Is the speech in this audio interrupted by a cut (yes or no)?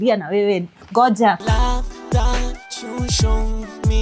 yes